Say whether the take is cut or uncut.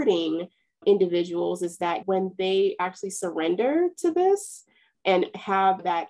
cut